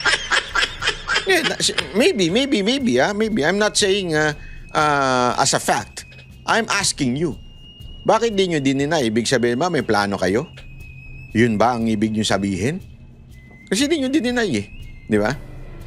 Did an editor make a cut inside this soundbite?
yes; 1 cut; at 1.2 s

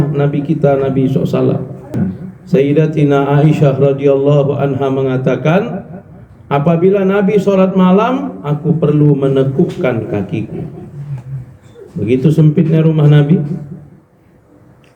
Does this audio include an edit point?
yes; 1 cut; at 2.0 s

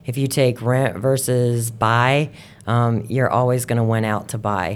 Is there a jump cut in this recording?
no; 0 cuts

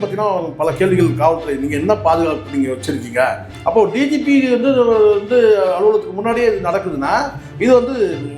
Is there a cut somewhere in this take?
yes; 1 cut; at 3.5 s

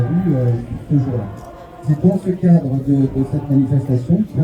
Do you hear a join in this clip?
yes; 1 cut; at 1.8 s

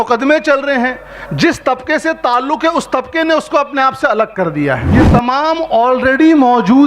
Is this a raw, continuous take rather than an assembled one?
no; 1 cut; at 4.9 s

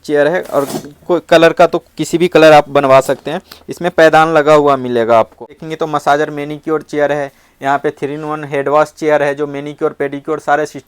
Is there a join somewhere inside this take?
yes; 1 cut; at 5.6 s

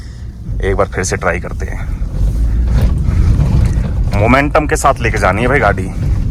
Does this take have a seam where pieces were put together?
no; 0 cuts

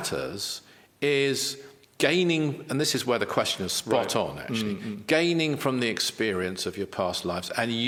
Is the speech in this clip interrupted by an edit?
no; 0 cuts

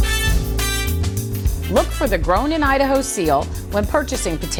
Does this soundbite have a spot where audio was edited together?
no; 0 cuts

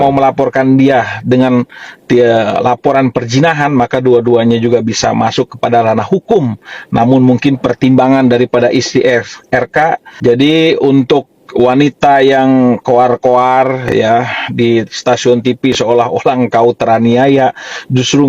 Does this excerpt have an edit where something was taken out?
yes; 1 cut; at 10.1 s

